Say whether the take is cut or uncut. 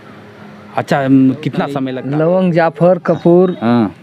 cut